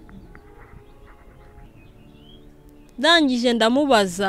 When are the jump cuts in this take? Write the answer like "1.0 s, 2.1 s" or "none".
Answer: 1.6 s